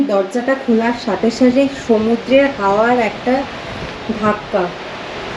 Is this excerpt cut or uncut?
uncut